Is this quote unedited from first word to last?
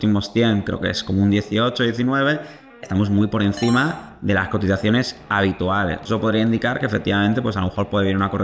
yes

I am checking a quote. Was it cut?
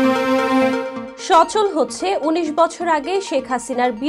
no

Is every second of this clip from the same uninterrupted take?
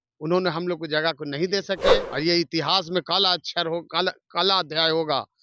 no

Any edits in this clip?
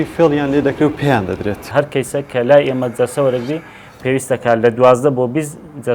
yes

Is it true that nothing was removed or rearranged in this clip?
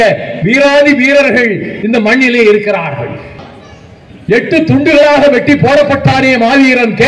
no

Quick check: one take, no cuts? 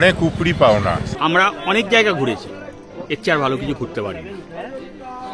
no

